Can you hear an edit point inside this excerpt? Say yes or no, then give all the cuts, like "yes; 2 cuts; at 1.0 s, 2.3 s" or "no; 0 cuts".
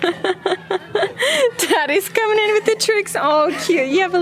no; 0 cuts